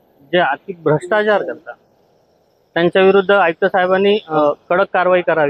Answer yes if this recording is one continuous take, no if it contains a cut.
no